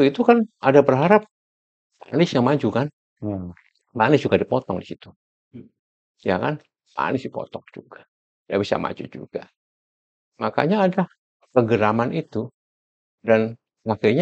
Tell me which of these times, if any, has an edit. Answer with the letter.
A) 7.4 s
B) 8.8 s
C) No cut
C